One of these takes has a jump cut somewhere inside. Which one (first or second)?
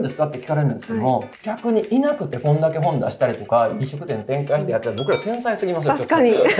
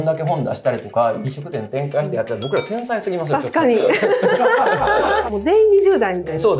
second